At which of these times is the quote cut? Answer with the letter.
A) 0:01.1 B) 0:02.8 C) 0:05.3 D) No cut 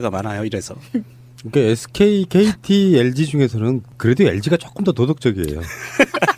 D